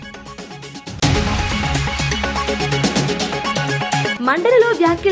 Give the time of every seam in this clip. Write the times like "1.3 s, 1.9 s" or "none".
0.9 s, 4.1 s

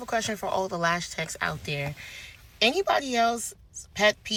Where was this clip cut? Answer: none

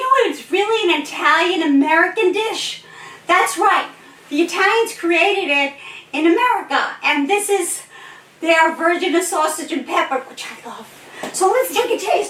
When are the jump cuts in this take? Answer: none

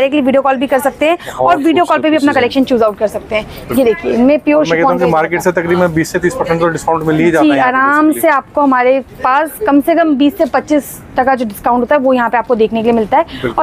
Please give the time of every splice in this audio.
none

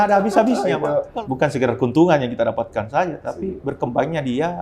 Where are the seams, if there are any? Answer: 1.1 s

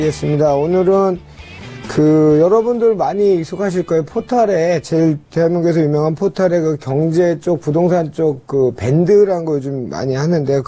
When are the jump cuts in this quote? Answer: none

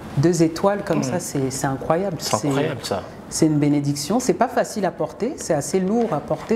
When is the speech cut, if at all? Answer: none

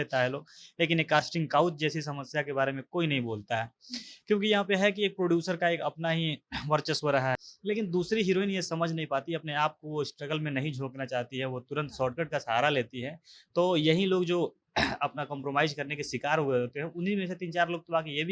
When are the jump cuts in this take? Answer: 7.4 s

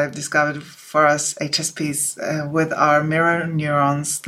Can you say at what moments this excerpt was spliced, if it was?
none

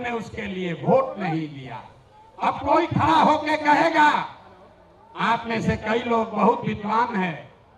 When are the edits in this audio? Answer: none

